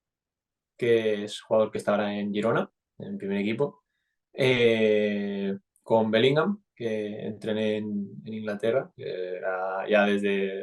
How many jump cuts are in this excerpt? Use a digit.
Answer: 0